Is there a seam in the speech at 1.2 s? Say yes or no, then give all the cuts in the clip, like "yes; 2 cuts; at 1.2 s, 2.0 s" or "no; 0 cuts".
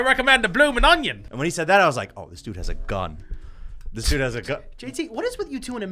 yes; 1 cut; at 1.2 s